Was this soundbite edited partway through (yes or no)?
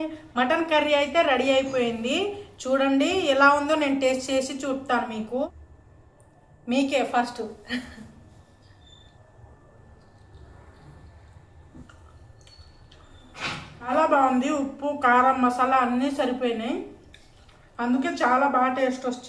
yes